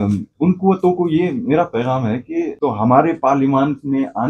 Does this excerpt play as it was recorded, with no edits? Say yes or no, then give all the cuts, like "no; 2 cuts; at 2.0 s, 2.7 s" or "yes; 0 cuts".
no; 1 cut; at 2.5 s